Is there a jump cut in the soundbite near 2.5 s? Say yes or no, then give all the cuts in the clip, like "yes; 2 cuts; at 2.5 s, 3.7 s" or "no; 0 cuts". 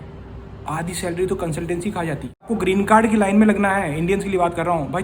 yes; 1 cut; at 2.5 s